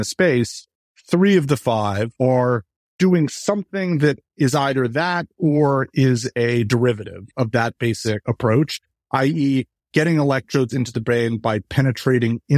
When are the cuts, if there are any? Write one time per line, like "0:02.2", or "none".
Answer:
0:02.1
0:07.3
0:08.2